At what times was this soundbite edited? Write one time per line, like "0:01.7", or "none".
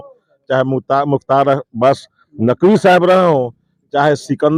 none